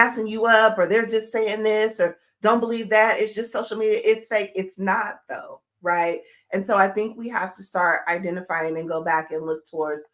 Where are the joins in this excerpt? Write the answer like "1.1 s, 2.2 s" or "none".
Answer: none